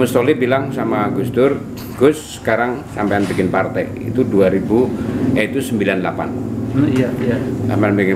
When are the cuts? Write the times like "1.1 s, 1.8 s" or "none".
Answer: none